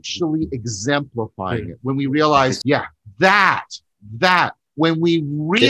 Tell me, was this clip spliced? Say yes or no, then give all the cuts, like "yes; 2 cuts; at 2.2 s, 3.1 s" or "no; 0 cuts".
yes; 1 cut; at 2.6 s